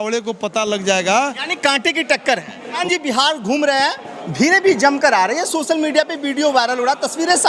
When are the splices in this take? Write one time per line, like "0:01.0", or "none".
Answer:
0:02.8